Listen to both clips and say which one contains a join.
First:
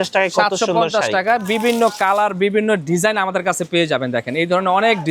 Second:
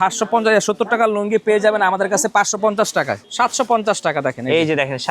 second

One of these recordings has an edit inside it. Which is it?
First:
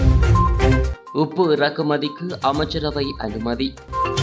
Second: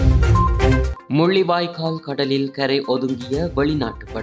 first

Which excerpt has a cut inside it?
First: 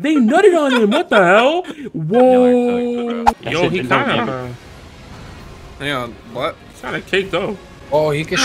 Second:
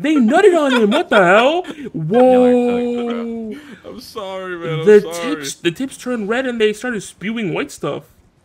first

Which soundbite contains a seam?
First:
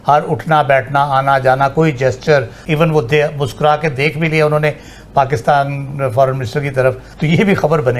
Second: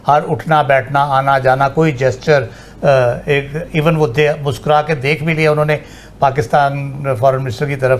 first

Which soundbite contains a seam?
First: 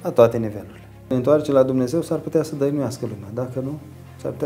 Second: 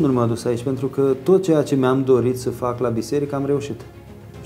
first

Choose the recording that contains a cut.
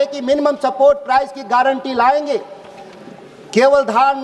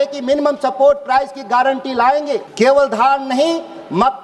second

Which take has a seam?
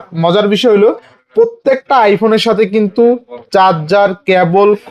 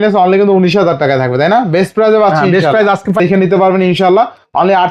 second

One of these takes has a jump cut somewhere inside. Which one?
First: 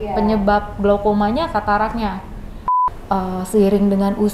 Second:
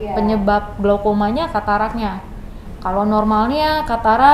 first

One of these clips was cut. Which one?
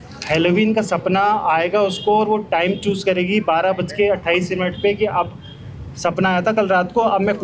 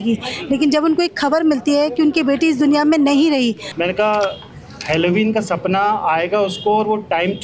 second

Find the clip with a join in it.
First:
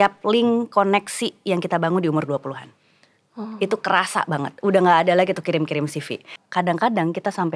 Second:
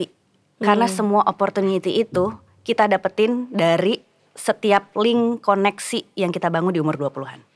first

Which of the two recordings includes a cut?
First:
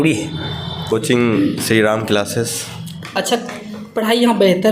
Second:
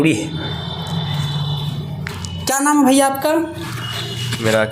first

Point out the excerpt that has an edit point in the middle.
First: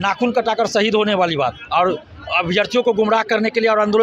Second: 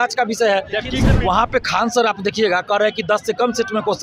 second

